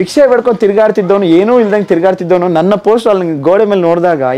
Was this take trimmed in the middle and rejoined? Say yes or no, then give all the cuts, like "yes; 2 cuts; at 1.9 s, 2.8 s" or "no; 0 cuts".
no; 0 cuts